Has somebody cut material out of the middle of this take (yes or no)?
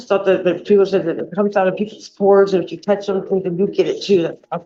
no